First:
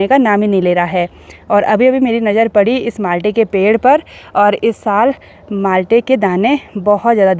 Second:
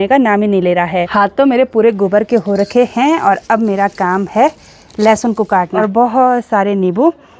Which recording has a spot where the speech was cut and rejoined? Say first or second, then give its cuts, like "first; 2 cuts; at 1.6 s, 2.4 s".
second; 2 cuts; at 1.1 s, 5.7 s